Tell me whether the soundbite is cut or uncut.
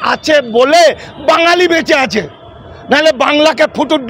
uncut